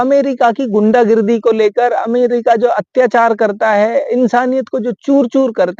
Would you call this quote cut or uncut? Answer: uncut